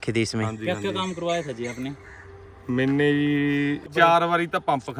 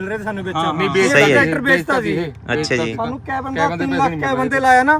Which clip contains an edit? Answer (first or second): first